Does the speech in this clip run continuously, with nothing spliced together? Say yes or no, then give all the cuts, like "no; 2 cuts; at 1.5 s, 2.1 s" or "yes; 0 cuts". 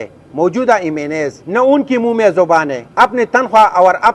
no; 2 cuts; at 1.4 s, 2.8 s